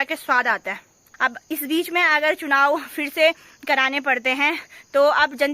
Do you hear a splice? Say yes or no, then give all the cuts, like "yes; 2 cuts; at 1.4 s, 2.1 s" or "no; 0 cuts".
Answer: yes; 1 cut; at 1.1 s